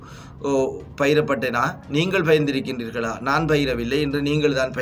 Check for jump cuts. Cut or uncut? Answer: uncut